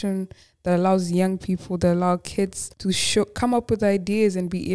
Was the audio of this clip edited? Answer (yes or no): yes